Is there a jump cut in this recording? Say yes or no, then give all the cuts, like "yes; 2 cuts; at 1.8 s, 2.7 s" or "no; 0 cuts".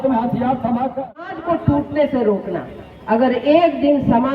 yes; 1 cut; at 1.4 s